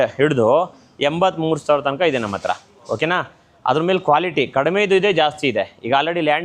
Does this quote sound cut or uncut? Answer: uncut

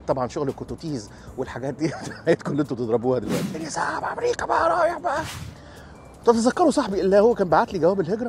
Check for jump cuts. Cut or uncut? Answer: cut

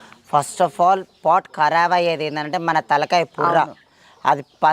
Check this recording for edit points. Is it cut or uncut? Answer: uncut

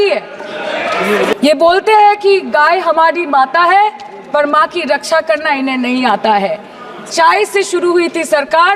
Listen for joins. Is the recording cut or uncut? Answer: cut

